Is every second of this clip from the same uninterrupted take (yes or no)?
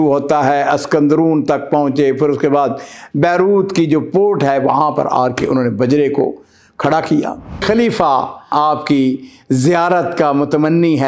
no